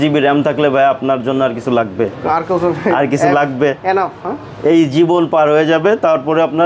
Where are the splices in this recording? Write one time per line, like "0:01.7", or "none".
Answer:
none